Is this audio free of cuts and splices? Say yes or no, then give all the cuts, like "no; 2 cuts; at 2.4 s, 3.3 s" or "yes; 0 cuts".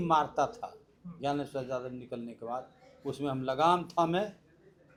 yes; 0 cuts